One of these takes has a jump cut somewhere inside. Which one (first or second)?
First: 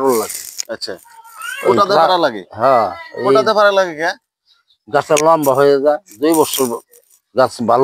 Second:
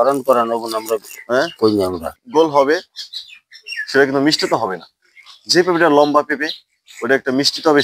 second